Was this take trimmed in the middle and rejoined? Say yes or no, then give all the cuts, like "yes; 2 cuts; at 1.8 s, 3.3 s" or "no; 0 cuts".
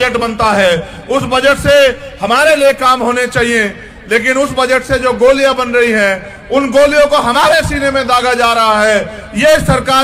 no; 0 cuts